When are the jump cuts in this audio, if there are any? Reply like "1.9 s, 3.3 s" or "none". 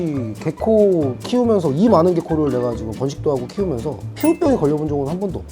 none